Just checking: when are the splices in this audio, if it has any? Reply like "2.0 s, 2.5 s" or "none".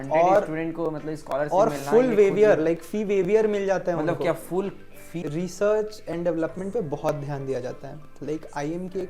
5.2 s